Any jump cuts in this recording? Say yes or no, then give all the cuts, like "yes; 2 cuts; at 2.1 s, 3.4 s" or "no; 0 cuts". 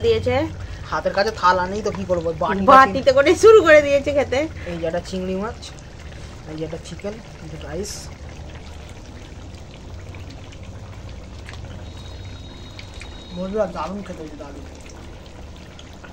no; 0 cuts